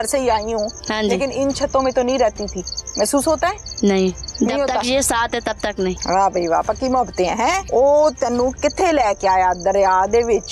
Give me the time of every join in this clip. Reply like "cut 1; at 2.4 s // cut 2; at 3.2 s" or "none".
cut 1; at 6.0 s // cut 2; at 7.6 s